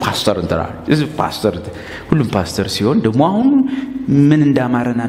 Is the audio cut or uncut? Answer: uncut